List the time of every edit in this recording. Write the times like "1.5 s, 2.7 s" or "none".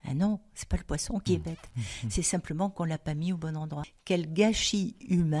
1.2 s, 3.8 s